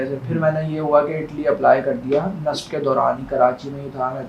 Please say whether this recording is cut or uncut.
uncut